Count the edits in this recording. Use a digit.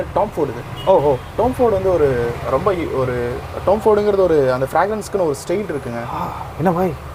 0